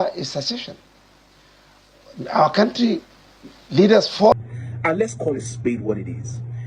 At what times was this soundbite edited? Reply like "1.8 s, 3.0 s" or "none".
4.3 s